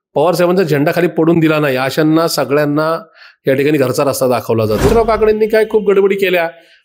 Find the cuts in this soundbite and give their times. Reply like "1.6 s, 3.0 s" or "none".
4.9 s